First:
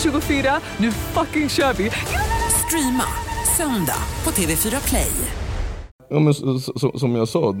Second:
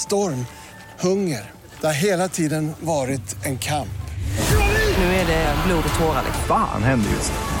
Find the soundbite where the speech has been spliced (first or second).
first